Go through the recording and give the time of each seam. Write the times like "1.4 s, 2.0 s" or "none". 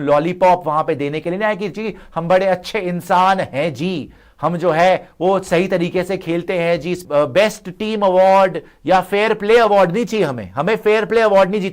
7.0 s